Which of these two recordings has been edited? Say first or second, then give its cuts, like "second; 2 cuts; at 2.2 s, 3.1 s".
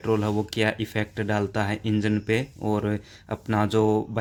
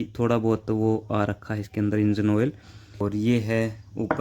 second; 1 cut; at 3.0 s